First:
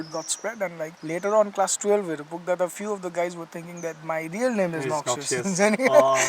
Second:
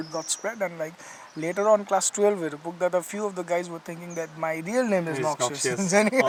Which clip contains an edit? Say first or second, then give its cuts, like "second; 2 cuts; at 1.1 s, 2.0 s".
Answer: first; 1 cut; at 1.0 s